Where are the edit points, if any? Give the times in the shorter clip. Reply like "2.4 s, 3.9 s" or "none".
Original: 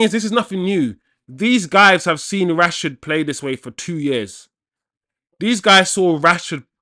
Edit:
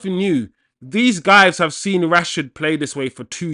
none